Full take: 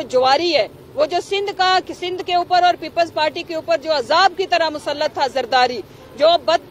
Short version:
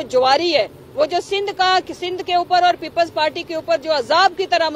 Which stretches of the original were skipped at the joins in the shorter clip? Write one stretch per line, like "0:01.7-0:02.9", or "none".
none